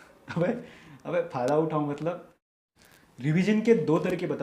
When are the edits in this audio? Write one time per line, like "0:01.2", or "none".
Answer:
0:02.4